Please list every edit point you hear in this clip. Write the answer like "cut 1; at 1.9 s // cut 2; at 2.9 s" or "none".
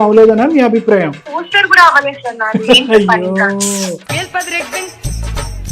cut 1; at 1.2 s // cut 2; at 4.0 s

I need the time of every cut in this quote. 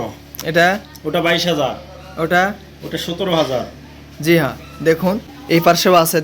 cut 1; at 5.3 s

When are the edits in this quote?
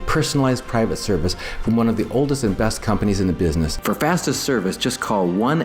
cut 1; at 3.8 s

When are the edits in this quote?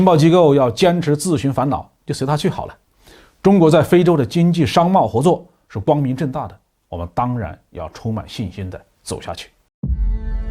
cut 1; at 9.6 s

